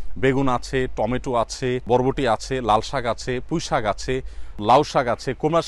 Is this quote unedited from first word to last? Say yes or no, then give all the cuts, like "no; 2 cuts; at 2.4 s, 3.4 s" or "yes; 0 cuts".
no; 2 cuts; at 1.8 s, 4.6 s